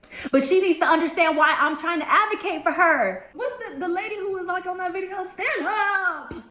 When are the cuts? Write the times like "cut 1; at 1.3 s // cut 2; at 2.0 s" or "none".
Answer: none